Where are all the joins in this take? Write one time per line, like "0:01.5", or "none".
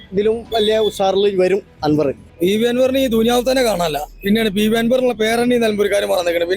0:02.3

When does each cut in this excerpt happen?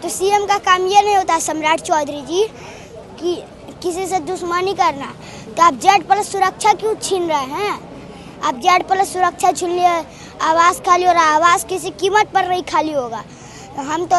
none

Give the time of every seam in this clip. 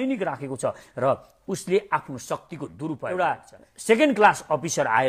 0:03.0

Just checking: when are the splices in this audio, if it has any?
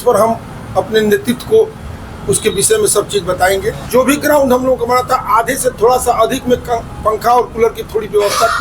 0:03.8

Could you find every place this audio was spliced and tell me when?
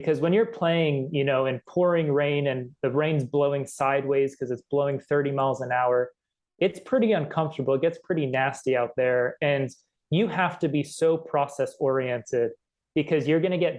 none

